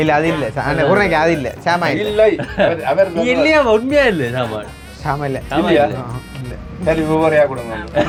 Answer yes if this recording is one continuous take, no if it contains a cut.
yes